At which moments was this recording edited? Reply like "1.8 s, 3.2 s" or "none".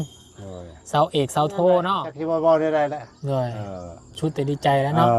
2.1 s